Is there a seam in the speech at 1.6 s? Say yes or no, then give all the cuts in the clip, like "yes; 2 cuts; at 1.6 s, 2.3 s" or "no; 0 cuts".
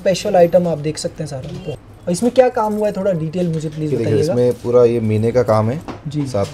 yes; 1 cut; at 1.6 s